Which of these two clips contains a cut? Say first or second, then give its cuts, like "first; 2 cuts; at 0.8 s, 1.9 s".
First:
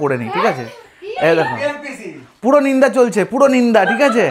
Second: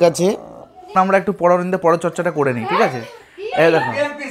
second; 1 cut; at 0.9 s